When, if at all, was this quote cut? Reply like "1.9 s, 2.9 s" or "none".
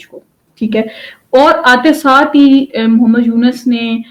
none